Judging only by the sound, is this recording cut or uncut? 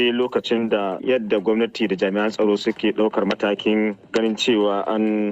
cut